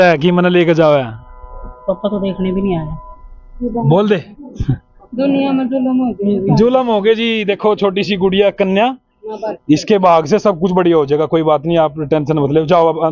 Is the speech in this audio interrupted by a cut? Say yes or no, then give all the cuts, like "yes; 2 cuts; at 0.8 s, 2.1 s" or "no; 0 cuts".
no; 0 cuts